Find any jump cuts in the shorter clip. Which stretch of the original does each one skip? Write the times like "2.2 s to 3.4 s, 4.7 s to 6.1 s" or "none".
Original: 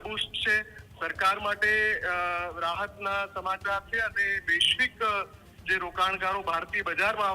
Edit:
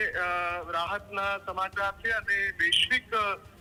none